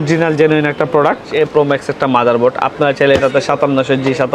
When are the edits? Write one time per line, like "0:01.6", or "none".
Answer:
0:01.3